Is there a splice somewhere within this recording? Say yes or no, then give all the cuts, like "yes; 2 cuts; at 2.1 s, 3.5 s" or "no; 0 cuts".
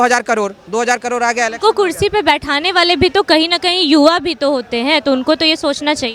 no; 0 cuts